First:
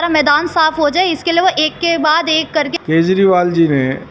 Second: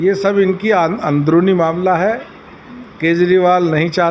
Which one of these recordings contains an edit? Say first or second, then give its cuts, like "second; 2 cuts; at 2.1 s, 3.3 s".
first; 1 cut; at 2.7 s